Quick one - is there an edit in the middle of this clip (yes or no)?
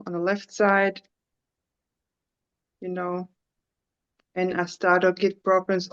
no